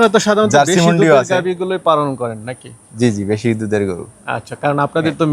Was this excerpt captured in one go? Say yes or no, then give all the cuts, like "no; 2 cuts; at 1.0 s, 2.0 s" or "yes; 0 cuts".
yes; 0 cuts